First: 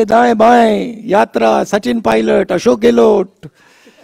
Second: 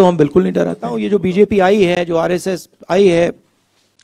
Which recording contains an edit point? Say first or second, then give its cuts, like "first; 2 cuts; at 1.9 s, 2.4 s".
second; 1 cut; at 1.0 s